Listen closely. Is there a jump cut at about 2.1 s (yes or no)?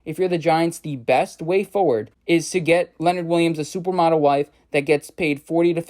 yes